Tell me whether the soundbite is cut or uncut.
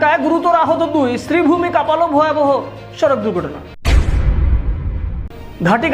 uncut